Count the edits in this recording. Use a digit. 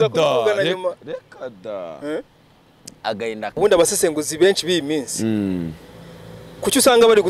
1